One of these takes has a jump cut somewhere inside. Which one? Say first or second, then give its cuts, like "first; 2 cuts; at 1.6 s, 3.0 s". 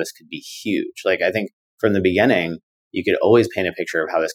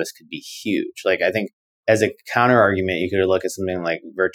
second; 1 cut; at 1.6 s